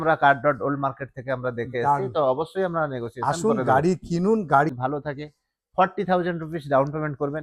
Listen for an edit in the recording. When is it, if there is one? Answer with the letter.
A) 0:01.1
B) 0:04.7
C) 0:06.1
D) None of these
B